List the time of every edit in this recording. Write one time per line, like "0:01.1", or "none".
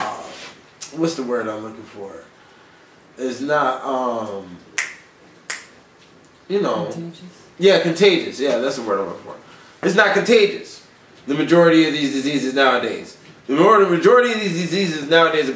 none